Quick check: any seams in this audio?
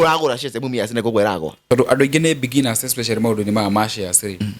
yes; 1 cut; at 1.5 s

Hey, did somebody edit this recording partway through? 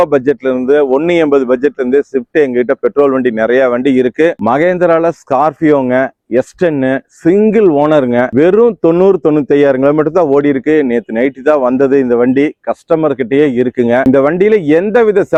no; 0 cuts

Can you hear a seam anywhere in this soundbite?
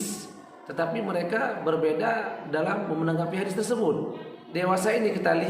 yes; 1 cut; at 4.5 s

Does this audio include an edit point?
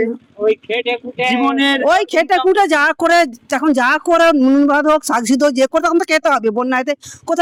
no; 0 cuts

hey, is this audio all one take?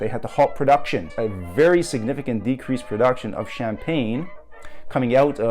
no; 1 cut; at 1.1 s

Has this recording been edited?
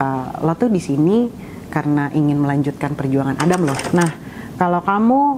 yes; 1 cut; at 3.8 s

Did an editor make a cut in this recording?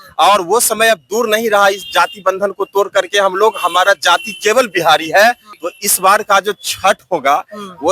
yes; 1 cut; at 5.5 s

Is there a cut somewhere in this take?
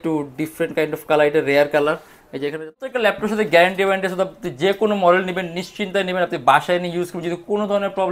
yes; 1 cut; at 2.7 s

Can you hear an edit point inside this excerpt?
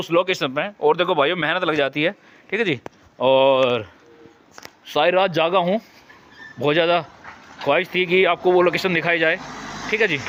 no; 0 cuts

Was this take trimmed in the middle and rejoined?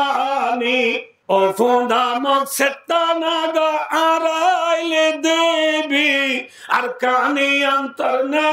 yes; 1 cut; at 1.1 s

